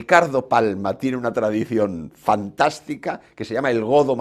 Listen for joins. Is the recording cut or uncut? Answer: uncut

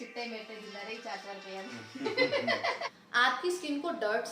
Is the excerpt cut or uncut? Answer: cut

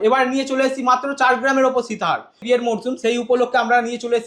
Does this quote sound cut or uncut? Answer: cut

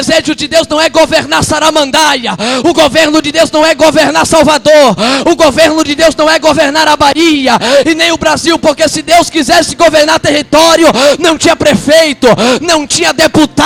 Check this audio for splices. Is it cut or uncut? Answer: uncut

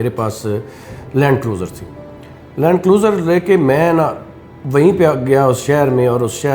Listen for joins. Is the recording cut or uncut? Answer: uncut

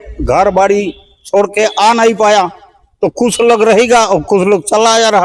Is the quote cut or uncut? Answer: uncut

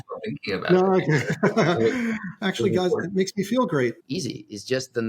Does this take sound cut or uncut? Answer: cut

